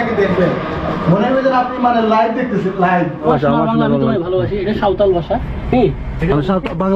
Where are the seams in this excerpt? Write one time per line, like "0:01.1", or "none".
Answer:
0:03.2